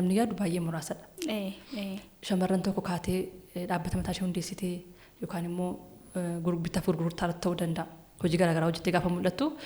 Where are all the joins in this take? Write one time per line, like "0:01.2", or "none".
none